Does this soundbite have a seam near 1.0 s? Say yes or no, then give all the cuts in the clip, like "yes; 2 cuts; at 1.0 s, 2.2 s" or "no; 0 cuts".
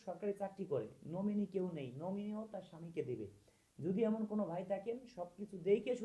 no; 0 cuts